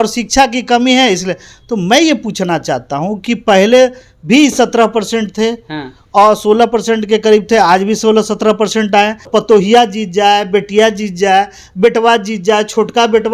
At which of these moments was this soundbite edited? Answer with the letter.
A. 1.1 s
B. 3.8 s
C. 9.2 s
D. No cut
C